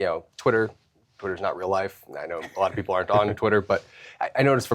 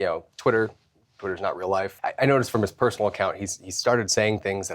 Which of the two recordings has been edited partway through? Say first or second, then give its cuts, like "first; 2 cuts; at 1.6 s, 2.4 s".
second; 1 cut; at 2.0 s